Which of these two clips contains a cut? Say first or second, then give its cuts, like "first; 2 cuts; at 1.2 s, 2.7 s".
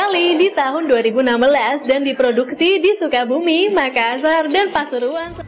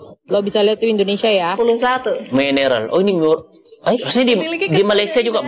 second; 2 cuts; at 1.5 s, 4.1 s